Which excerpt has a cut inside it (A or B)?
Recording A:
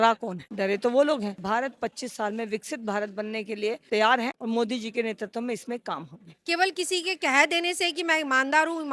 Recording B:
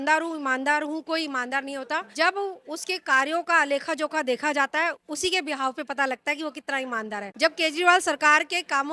A